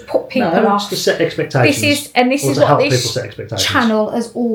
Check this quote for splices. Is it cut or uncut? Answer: uncut